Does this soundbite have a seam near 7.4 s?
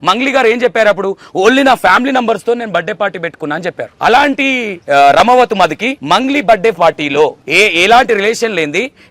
yes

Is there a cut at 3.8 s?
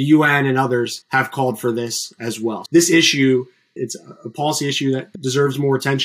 yes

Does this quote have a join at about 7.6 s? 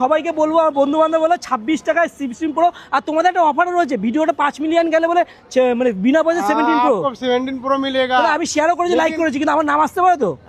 no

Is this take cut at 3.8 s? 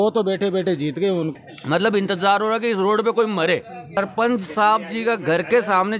no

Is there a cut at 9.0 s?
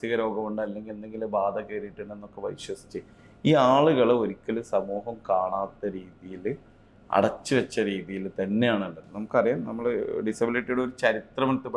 no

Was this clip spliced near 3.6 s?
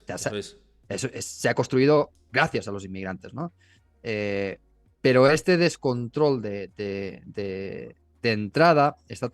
no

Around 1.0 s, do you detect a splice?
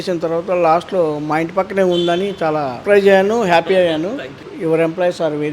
no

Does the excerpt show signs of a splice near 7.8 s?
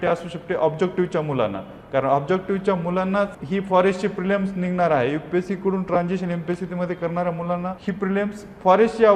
yes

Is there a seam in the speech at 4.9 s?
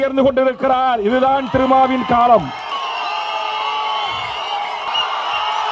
yes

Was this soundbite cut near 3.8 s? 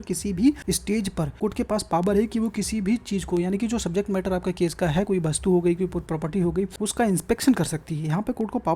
no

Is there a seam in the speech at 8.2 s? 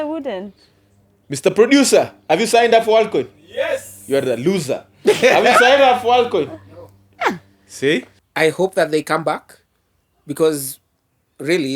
yes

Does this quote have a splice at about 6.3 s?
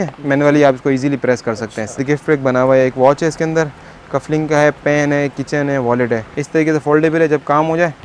yes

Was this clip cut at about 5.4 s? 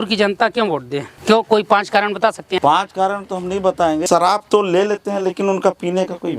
no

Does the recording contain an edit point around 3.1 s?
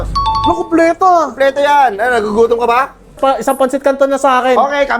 yes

